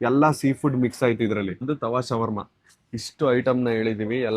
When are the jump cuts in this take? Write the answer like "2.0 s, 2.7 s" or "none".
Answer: 1.6 s